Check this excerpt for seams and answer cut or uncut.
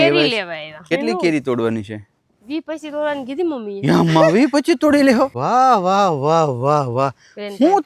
cut